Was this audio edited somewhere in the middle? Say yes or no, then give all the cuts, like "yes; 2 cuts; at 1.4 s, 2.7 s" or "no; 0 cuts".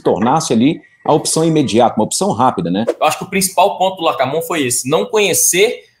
yes; 1 cut; at 2.9 s